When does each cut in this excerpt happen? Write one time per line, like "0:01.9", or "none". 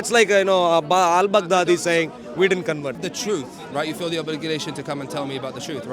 0:03.0